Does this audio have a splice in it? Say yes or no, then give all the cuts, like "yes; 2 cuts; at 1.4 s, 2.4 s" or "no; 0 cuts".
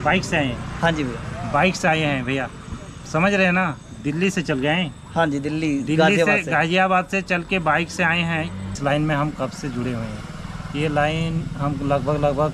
yes; 1 cut; at 8.8 s